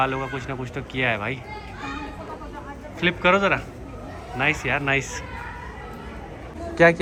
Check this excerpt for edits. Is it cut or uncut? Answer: uncut